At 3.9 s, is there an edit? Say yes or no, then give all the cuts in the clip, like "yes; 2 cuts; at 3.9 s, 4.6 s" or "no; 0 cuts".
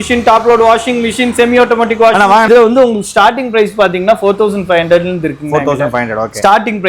no; 1 cut; at 2.4 s